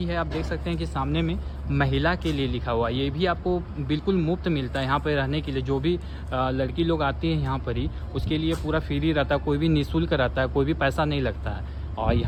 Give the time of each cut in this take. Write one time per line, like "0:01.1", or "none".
none